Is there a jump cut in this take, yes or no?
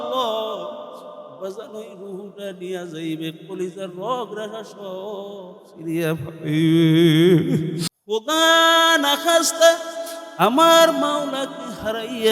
yes